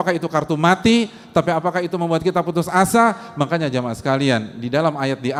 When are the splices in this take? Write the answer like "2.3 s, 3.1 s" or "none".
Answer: none

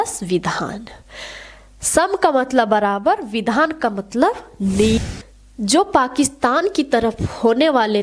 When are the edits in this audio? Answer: 5.0 s

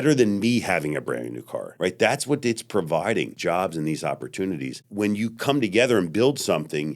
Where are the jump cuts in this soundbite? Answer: 1.7 s, 3.3 s, 4.8 s

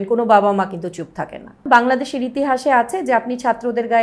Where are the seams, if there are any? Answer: 1.6 s

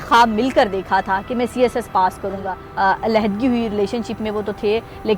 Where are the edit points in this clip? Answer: 2.6 s

